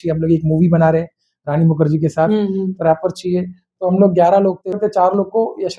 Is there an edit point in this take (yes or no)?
yes